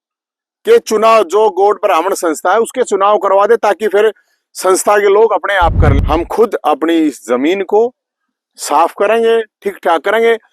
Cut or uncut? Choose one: cut